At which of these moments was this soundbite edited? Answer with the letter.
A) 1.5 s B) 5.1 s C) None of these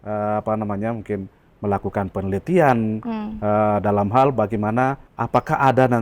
B